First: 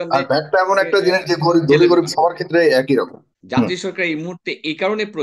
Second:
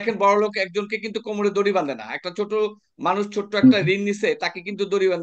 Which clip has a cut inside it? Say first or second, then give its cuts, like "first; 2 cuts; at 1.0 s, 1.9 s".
first; 1 cut; at 3.2 s